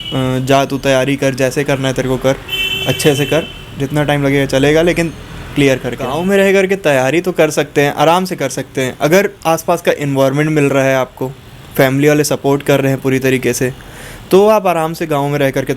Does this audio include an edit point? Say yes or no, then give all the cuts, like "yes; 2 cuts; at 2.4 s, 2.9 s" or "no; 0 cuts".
yes; 1 cut; at 6.2 s